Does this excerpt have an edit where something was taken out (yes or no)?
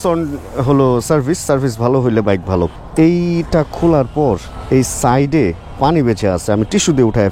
yes